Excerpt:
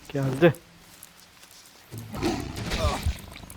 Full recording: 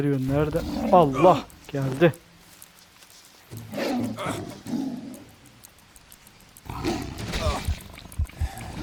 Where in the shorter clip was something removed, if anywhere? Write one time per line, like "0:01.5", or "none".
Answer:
0:02.2